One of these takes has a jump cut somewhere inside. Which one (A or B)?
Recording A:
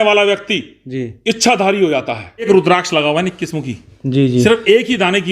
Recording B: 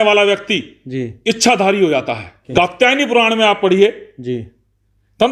A